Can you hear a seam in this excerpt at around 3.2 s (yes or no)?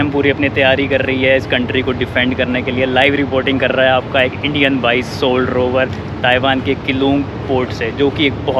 no